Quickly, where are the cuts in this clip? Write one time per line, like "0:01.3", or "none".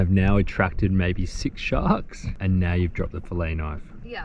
0:02.2